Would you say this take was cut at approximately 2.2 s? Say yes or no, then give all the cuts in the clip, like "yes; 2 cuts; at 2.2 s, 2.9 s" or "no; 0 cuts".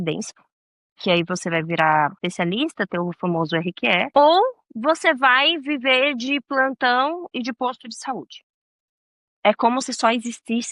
yes; 2 cuts; at 2.2 s, 4.1 s